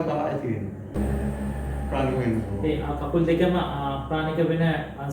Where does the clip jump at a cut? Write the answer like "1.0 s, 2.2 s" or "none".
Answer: 1.0 s